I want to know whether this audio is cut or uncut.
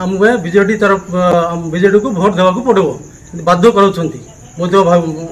uncut